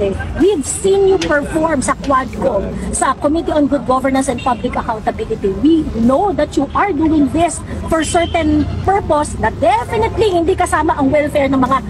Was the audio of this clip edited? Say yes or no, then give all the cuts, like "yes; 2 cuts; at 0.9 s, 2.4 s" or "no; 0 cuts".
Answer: no; 0 cuts